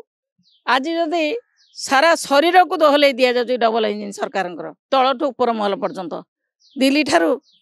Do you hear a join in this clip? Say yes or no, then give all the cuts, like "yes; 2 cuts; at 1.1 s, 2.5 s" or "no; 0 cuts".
no; 0 cuts